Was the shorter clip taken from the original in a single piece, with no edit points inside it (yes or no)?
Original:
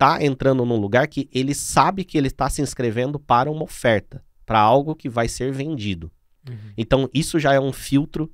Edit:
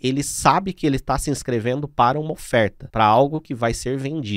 no